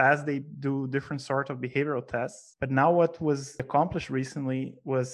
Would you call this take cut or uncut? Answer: cut